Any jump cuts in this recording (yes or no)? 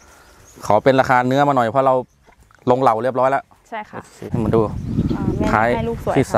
yes